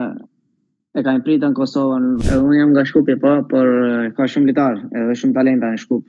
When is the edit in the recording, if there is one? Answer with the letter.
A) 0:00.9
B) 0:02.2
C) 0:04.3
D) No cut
B